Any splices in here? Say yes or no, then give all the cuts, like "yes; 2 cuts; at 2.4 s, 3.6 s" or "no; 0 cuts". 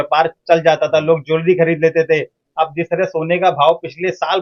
no; 0 cuts